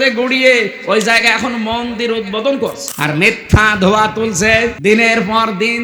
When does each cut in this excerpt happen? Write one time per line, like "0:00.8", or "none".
0:02.9
0:04.8